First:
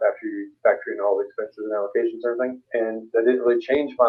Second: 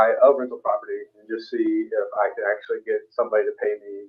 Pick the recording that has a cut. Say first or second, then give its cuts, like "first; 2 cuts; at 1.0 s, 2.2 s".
first; 1 cut; at 2.6 s